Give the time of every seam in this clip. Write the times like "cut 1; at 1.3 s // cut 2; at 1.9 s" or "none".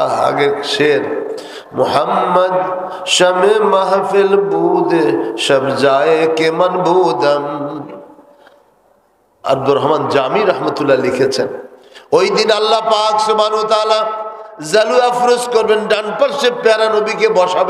none

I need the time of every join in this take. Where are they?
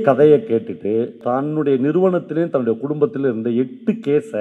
cut 1; at 1.2 s

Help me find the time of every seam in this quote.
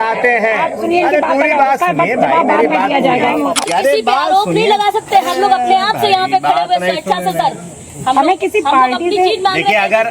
cut 1; at 3.6 s

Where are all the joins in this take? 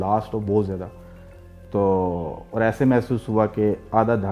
none

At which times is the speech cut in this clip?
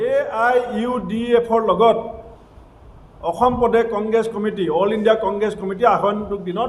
none

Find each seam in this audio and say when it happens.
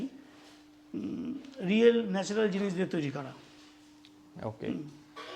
none

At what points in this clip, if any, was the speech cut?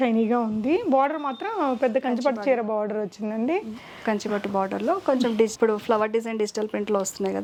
none

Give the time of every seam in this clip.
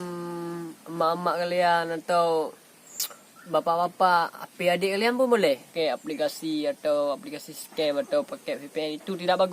cut 1; at 5.7 s

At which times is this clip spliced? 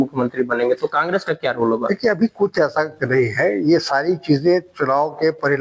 none

